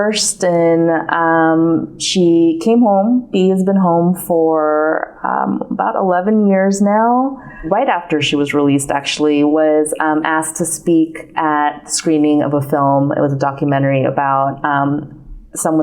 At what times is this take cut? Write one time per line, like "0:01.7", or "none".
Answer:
0:07.7